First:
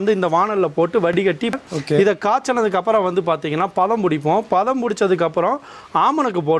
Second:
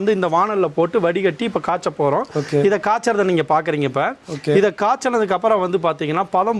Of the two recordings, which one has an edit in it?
first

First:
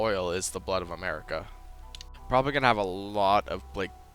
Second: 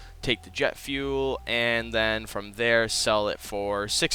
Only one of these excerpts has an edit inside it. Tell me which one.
first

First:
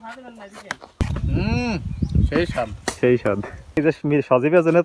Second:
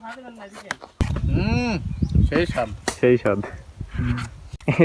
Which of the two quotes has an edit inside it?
first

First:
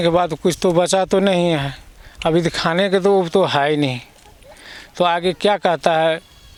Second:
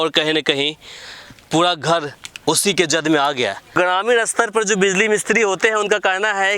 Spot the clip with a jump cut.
second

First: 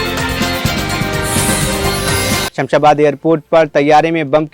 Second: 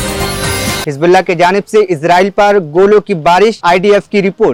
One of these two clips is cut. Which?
first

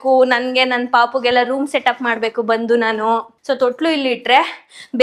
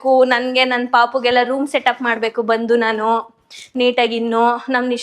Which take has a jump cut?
first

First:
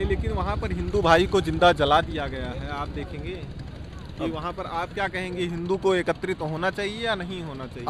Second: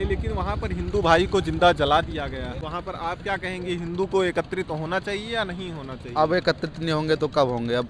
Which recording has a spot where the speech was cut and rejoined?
second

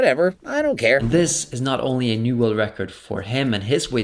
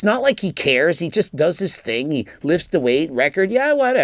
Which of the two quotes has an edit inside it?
first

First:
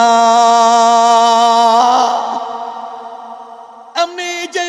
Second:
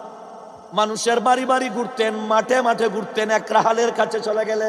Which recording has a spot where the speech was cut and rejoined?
first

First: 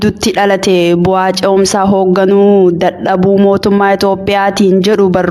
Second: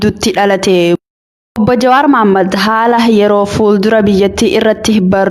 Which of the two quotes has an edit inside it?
second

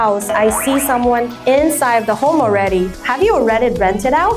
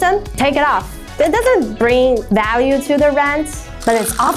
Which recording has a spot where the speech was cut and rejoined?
first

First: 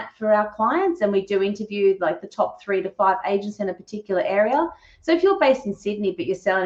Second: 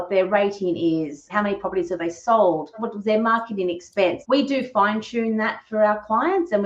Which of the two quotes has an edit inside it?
second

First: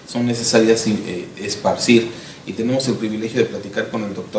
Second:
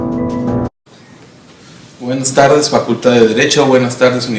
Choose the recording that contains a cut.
first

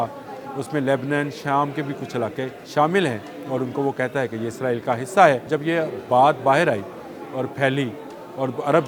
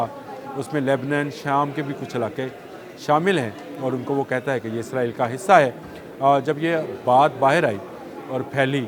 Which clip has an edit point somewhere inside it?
first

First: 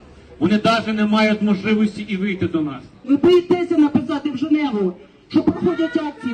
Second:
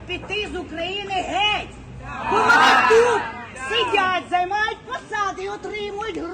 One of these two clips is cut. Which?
first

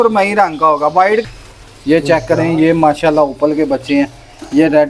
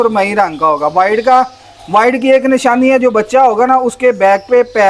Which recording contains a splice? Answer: first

